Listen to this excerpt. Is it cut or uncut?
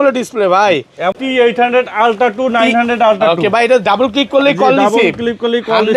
cut